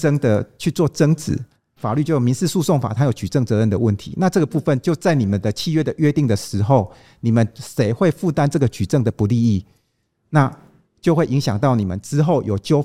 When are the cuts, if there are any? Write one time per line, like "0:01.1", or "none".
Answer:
0:01.8